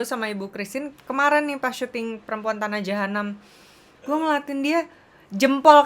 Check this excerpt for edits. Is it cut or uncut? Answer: uncut